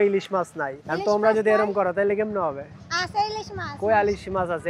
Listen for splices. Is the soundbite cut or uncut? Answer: uncut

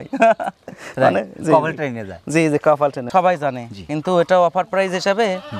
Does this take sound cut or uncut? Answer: cut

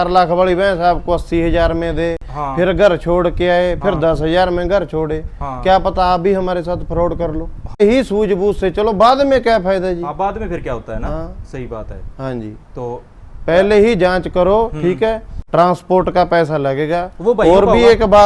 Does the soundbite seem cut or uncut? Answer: cut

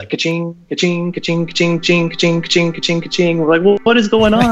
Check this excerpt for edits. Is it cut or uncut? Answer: uncut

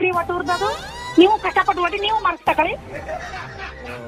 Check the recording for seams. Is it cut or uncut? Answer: cut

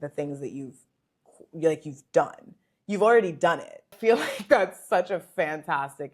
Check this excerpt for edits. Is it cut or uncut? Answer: cut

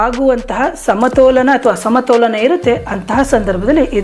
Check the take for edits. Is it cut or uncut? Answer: uncut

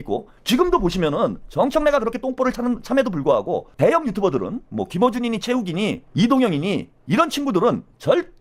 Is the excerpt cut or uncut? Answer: uncut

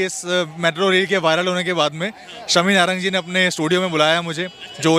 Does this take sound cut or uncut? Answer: uncut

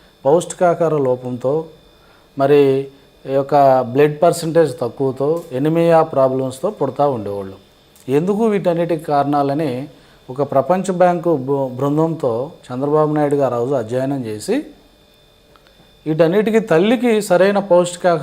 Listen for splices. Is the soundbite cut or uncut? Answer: cut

